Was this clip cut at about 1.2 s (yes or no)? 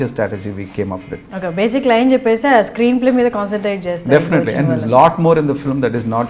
yes